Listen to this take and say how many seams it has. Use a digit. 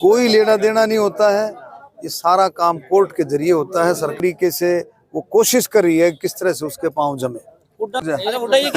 1